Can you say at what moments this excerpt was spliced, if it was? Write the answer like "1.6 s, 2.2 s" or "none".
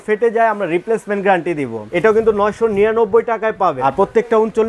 1.8 s, 3.8 s